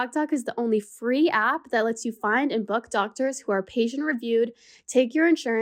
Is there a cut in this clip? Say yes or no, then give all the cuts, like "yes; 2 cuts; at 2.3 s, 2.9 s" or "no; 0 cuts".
no; 0 cuts